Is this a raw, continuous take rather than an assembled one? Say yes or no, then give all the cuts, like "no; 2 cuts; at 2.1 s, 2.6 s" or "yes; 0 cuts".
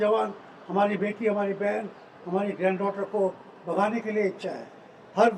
yes; 0 cuts